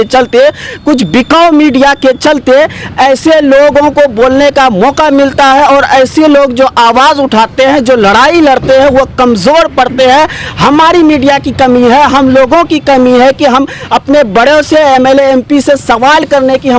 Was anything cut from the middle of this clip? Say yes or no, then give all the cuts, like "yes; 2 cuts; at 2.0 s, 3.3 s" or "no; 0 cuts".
no; 0 cuts